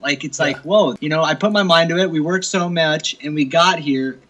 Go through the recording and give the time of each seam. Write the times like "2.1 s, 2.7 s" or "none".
1.0 s